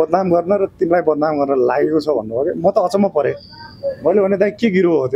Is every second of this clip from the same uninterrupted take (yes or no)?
yes